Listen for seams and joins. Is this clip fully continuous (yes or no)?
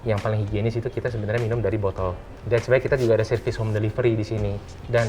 no